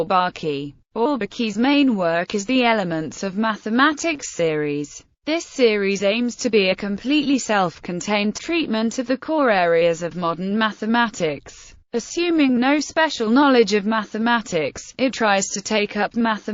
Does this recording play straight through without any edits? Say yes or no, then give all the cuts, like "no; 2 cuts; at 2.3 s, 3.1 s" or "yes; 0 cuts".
yes; 0 cuts